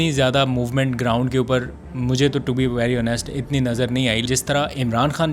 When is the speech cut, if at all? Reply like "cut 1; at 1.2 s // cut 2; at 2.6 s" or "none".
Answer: cut 1; at 4.3 s